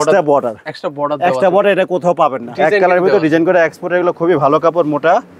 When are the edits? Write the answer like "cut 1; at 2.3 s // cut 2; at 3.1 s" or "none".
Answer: cut 1; at 2.4 s